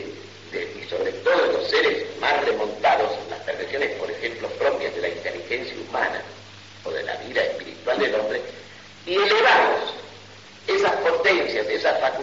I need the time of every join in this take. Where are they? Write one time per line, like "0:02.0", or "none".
none